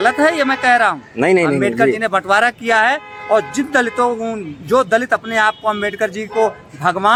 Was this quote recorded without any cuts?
yes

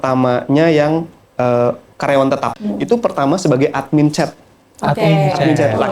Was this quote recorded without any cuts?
no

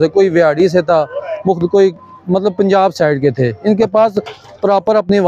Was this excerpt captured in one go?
yes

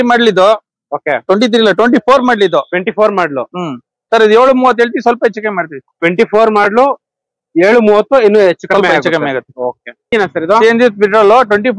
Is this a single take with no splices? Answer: no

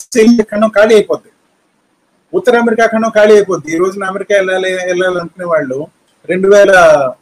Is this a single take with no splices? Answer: yes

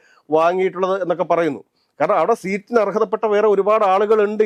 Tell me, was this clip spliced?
no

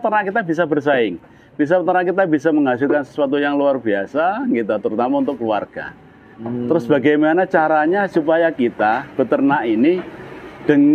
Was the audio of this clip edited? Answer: no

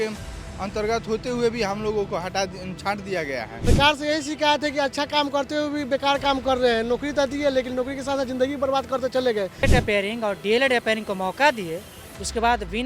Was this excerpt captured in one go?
no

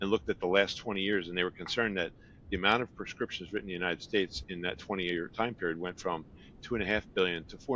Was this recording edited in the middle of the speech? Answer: no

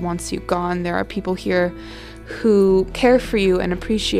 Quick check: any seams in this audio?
yes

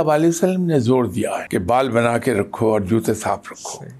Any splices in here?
yes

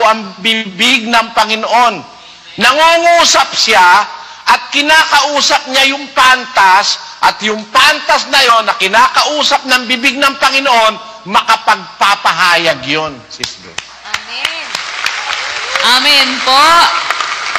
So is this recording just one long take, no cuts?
yes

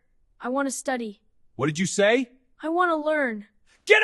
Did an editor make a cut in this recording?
no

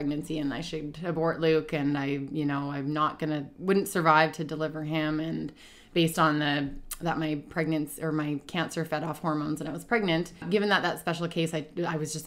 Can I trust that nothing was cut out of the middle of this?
no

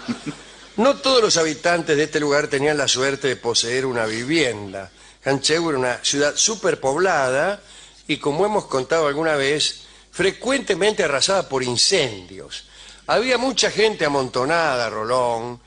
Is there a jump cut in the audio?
yes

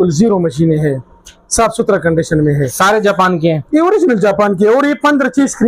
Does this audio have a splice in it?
no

